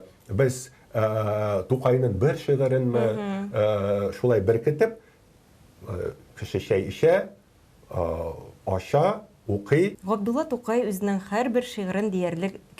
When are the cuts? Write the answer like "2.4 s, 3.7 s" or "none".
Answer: 10.0 s